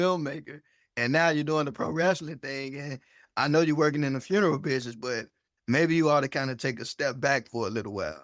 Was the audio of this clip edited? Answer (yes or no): no